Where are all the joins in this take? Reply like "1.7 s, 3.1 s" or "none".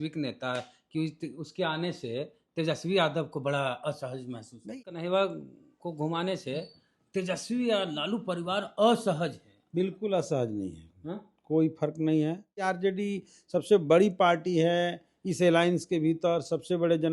4.7 s, 12.6 s